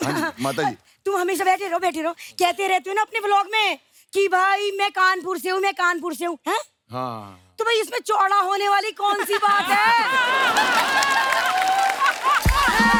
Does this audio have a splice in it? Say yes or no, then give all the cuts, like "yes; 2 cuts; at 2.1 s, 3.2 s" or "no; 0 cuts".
no; 0 cuts